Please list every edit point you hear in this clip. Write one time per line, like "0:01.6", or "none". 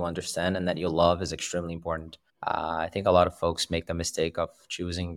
none